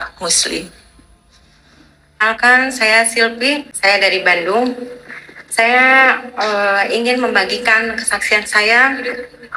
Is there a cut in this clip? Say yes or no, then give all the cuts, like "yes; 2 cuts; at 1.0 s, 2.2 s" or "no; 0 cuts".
yes; 2 cuts; at 2.2 s, 3.7 s